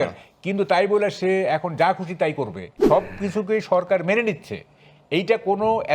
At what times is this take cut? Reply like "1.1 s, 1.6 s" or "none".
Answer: 2.7 s